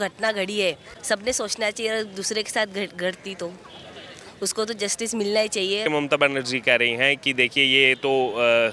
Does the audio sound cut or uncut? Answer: cut